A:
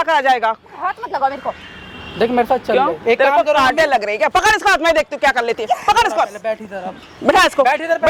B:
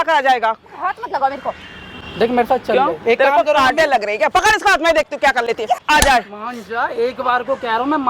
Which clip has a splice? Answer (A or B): B